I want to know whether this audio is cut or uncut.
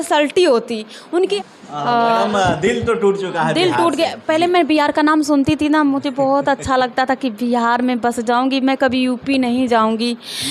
cut